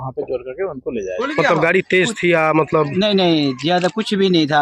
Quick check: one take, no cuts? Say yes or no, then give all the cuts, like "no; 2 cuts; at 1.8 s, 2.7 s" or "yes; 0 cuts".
no; 1 cut; at 1.1 s